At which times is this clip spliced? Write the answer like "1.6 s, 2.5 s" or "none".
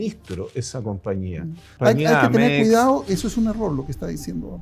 1.6 s

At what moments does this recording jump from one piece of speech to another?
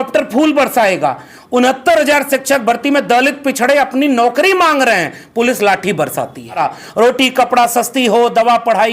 6.6 s

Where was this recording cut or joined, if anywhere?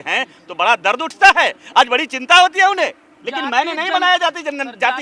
none

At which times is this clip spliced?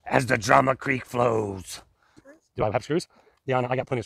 2.3 s

